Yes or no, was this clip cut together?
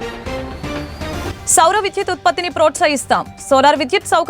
yes